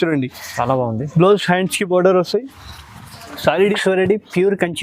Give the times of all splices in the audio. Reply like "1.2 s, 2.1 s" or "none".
3.7 s